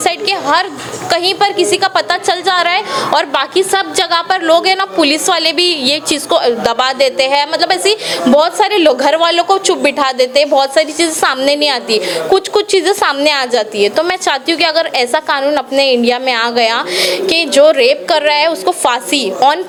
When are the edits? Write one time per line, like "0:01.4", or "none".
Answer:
none